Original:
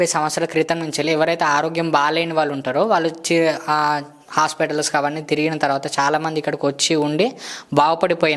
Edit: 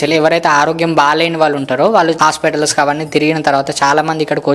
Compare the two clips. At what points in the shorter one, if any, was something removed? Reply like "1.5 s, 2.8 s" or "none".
2.2 s

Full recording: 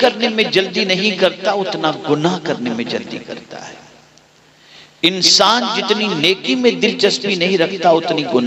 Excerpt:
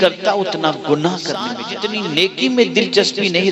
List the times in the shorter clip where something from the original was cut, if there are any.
1.7 s

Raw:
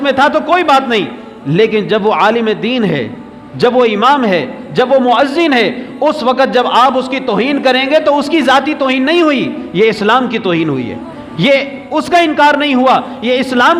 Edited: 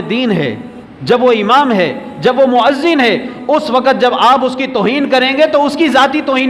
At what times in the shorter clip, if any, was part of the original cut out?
none

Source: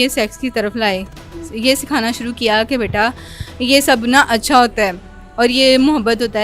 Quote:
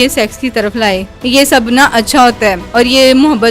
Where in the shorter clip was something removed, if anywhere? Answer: 1.1 s, 2.6 s

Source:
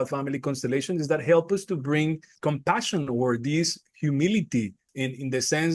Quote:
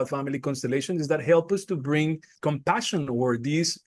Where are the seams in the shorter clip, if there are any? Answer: none

